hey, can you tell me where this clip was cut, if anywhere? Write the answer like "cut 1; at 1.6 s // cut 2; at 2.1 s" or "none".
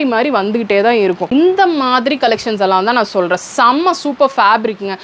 cut 1; at 1.3 s